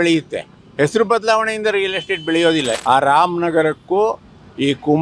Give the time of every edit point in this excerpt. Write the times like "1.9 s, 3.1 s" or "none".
2.7 s

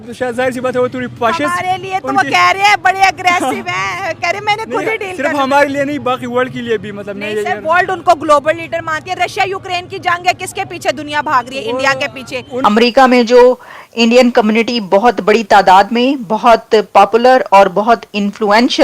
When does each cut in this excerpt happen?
12.5 s

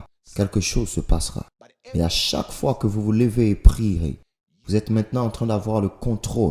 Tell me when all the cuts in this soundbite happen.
none

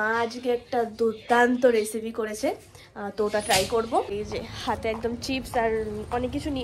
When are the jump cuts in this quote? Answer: 4.1 s

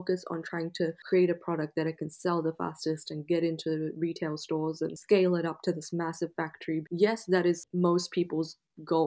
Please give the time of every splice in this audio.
1.0 s, 5.0 s, 6.8 s, 7.7 s

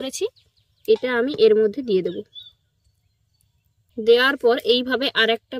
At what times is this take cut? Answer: 3.9 s

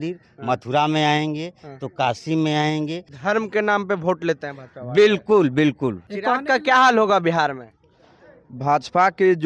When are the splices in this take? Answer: 3.1 s, 6.1 s

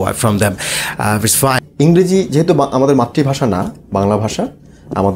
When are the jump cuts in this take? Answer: 1.7 s

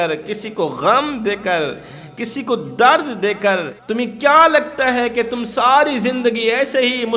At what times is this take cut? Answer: 3.8 s

